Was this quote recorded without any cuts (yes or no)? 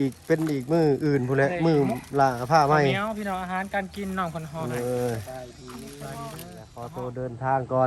no